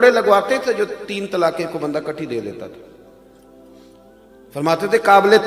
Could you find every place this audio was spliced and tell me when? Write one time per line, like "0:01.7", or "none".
0:02.9
0:04.3